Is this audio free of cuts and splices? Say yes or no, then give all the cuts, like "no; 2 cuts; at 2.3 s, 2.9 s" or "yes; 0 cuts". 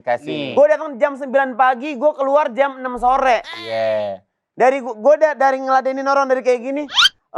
yes; 0 cuts